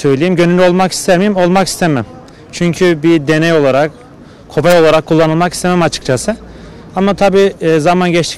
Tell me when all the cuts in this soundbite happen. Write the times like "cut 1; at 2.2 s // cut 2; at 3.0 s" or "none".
none

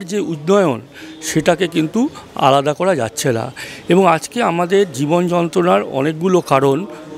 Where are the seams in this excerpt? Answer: none

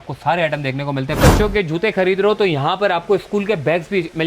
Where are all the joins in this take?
cut 1; at 1.2 s

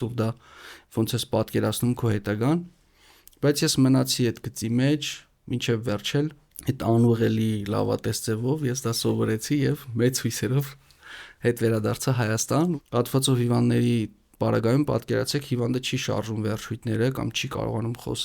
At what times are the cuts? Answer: cut 1; at 6.5 s // cut 2; at 12.7 s

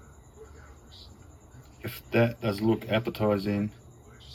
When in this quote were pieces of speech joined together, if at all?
none

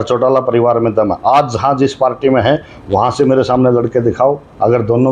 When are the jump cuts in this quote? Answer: none

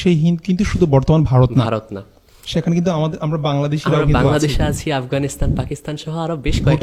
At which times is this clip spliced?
none

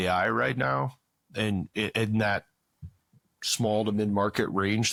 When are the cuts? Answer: none

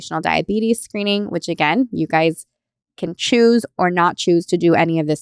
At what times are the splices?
none

